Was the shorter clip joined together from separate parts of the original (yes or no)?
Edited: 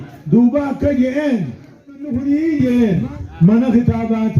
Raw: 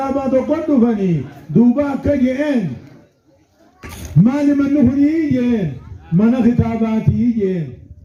yes